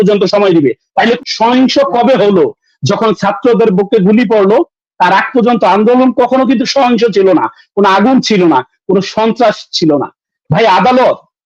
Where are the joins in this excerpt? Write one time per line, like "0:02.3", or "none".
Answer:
0:01.2